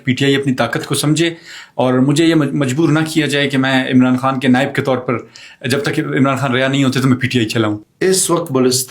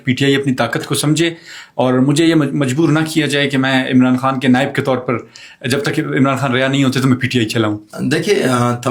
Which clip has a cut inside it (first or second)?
first